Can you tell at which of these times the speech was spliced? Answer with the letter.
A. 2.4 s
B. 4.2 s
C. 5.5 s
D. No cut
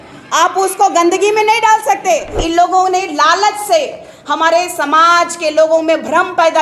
A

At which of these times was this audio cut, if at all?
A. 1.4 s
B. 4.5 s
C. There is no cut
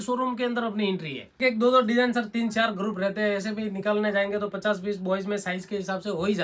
A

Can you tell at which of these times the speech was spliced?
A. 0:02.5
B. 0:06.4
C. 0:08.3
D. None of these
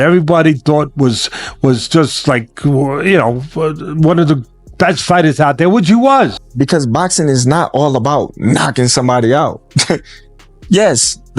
B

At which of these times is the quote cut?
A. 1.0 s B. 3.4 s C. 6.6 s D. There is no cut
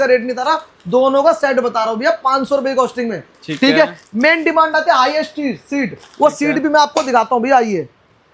D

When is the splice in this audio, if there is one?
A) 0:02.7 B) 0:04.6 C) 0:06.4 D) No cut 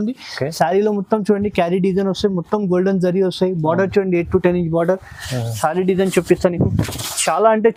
D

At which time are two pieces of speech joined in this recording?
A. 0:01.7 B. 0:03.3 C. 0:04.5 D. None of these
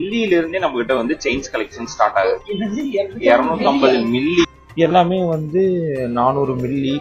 C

